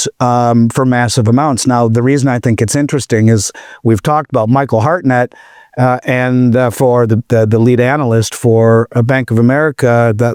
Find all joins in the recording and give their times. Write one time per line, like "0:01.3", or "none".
none